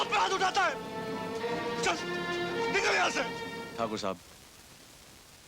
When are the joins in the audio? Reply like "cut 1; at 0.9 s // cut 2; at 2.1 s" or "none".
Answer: cut 1; at 3.6 s